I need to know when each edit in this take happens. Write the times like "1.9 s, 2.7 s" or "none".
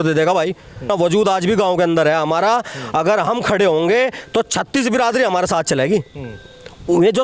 0.9 s